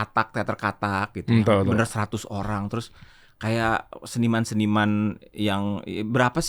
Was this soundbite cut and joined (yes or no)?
no